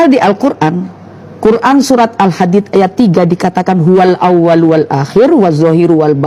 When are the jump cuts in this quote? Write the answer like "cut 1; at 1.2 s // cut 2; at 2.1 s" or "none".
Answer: none